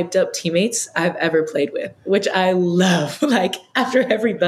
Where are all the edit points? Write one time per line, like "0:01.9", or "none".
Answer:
none